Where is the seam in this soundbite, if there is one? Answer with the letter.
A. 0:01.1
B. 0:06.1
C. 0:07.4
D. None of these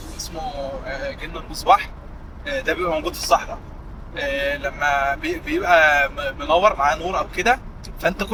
D